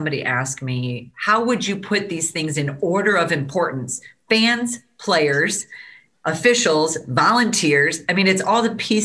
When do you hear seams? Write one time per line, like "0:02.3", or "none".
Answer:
0:01.1